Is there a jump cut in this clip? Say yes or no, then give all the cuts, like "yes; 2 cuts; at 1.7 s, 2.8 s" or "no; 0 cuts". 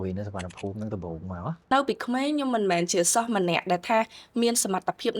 yes; 1 cut; at 1.7 s